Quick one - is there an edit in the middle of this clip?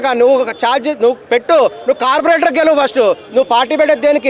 no; 0 cuts

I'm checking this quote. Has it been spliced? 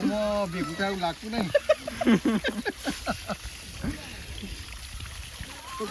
no; 0 cuts

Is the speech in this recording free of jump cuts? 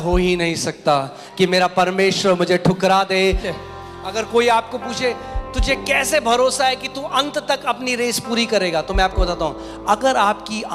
no; 1 cut; at 3.5 s

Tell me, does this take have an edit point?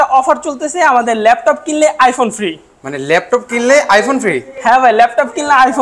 no; 0 cuts

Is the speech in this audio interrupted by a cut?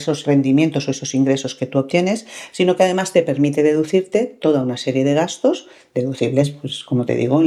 no; 0 cuts

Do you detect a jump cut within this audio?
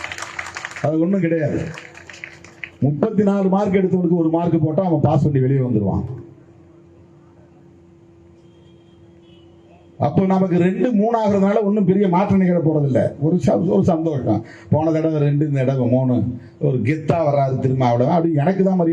no; 0 cuts

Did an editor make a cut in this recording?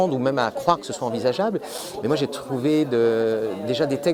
no; 0 cuts

